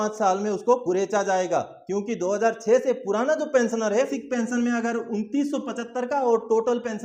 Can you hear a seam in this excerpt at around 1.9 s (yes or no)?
no